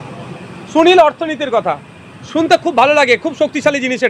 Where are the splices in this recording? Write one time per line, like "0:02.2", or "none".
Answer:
none